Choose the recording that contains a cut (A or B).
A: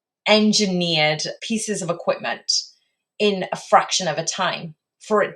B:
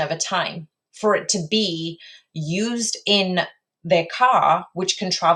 A